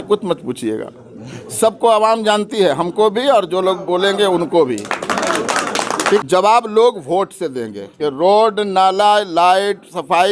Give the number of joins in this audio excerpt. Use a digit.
2